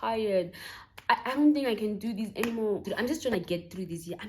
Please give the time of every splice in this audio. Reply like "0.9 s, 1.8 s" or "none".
2.8 s